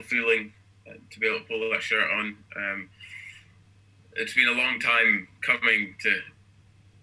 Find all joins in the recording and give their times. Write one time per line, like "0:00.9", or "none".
none